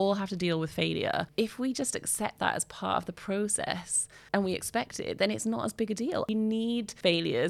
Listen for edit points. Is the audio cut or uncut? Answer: cut